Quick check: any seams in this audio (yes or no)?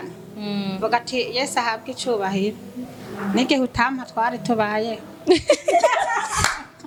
no